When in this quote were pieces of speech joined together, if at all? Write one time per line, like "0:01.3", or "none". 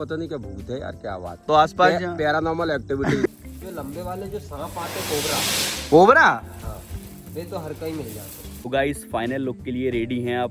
0:03.3
0:08.7

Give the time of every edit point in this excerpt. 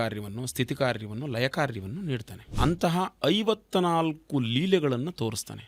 0:02.4

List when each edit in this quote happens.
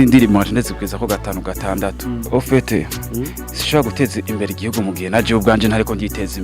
0:02.3

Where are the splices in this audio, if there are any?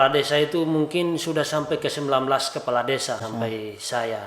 0:03.2

